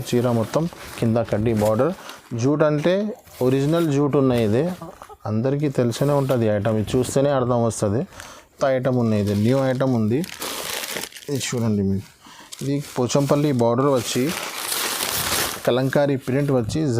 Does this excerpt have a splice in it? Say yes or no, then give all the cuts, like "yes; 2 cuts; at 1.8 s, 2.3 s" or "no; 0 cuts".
yes; 1 cut; at 8.5 s